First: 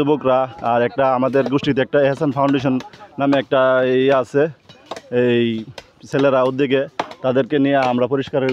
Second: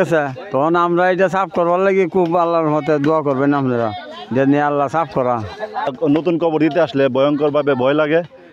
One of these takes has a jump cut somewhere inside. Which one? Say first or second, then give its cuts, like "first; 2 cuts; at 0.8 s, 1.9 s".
second; 1 cut; at 5.9 s